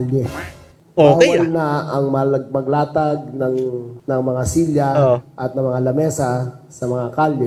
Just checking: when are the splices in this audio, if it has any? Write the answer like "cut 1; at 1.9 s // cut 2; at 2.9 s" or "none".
none